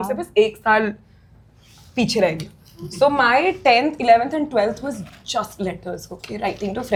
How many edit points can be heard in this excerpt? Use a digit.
0